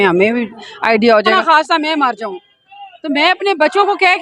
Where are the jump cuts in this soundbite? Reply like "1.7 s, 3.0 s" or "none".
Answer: 1.4 s